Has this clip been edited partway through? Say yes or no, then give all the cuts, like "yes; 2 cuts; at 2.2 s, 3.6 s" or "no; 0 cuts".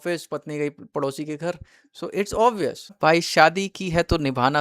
yes; 1 cut; at 2.9 s